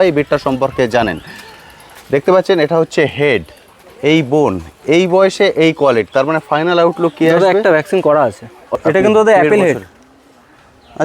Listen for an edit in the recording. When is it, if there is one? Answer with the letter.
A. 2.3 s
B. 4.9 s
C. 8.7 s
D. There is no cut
C